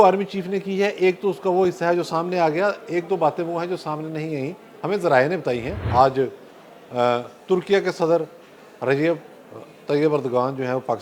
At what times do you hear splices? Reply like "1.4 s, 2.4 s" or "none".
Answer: 5.8 s